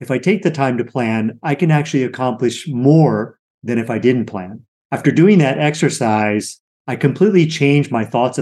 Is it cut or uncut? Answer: uncut